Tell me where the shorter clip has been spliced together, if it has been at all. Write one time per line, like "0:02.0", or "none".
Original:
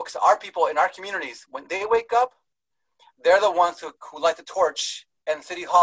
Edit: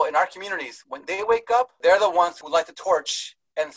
0:01.7
0:02.4